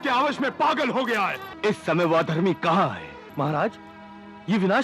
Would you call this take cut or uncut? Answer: cut